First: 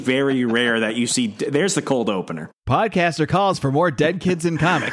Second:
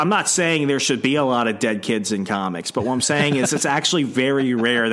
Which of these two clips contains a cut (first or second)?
first